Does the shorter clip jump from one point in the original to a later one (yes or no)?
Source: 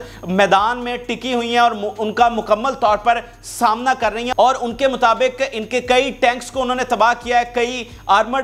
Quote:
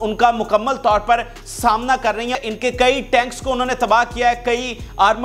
yes